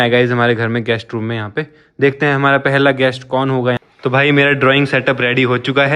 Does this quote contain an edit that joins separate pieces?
yes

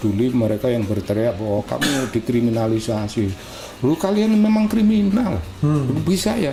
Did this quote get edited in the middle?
no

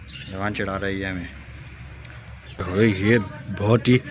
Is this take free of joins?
no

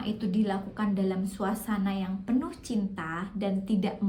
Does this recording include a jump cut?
no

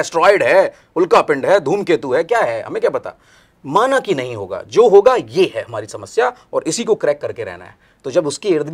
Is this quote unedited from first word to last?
yes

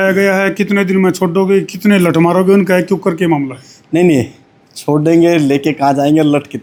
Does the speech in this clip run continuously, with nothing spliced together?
yes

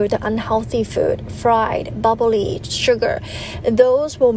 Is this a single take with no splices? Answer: yes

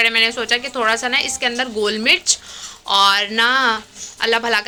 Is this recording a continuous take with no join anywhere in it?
yes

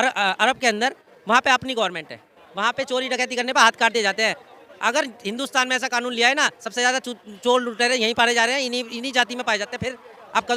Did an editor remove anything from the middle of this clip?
no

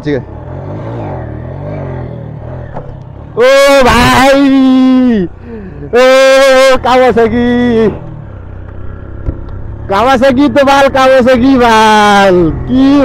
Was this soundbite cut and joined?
no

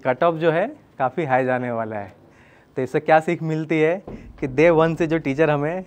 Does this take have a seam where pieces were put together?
no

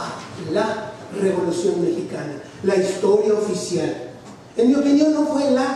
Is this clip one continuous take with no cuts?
no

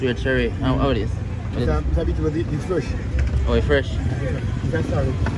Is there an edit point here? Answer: no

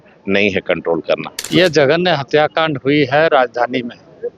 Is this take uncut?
no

